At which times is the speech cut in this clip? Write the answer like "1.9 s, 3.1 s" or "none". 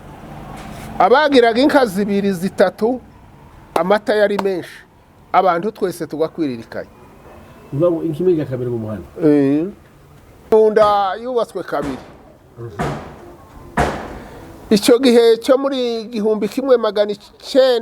10.5 s